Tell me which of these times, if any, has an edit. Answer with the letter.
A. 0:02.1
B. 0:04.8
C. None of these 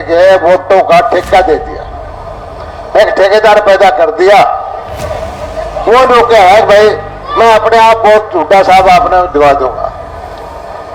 C